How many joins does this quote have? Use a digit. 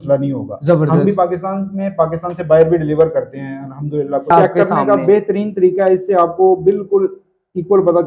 1